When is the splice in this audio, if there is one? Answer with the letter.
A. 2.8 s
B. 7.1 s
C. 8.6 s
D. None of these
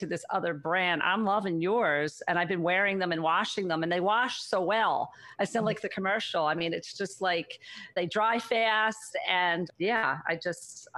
D